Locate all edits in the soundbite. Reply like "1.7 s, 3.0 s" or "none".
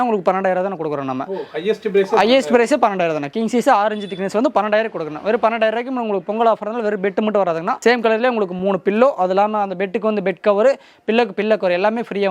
none